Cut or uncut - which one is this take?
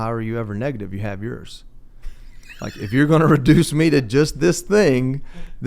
uncut